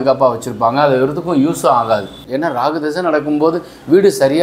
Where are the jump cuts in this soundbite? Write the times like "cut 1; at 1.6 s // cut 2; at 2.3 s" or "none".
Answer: cut 1; at 2.2 s